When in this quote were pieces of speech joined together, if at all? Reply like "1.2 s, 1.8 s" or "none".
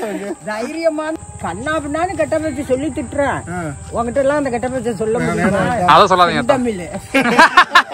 1.2 s